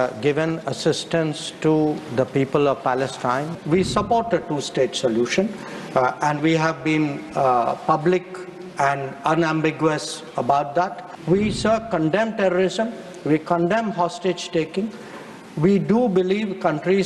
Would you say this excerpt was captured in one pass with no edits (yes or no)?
no